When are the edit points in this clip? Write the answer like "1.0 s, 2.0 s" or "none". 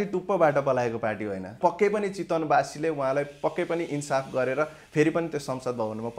1.6 s